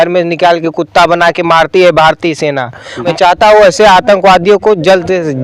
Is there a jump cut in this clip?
yes; 1 cut; at 3.1 s

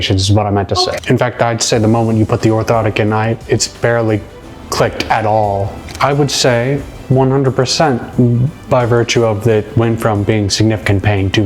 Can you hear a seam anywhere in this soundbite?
yes; 2 cuts; at 1.0 s, 5.8 s

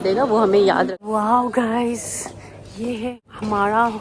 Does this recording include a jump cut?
yes; 1 cut; at 0.9 s

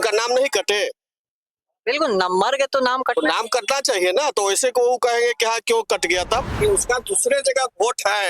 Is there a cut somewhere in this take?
yes; 1 cut; at 6.5 s

